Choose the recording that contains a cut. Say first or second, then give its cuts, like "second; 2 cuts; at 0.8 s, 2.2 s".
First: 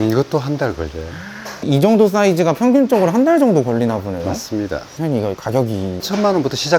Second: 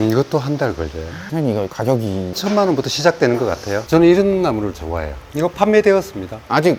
second; 2 cuts; at 1.2 s, 3.7 s